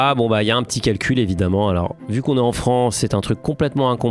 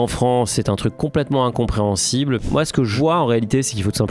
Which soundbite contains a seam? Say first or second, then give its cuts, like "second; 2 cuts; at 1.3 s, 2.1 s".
second; 1 cut; at 2.7 s